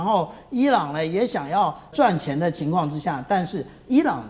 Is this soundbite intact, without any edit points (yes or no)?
no